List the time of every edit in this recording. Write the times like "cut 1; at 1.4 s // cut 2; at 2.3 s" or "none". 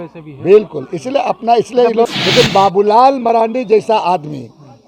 cut 1; at 2.1 s